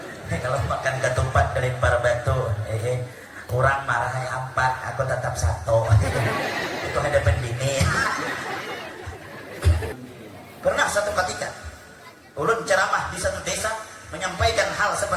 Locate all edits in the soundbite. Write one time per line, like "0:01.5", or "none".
0:09.9